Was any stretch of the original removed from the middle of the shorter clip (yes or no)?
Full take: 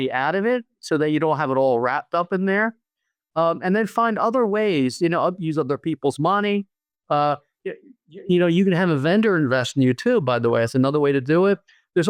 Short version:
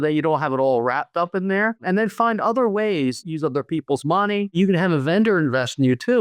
yes